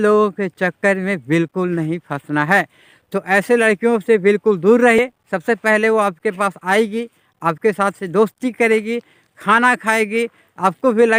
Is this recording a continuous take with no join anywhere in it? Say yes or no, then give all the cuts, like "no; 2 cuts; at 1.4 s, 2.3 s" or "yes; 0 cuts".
yes; 0 cuts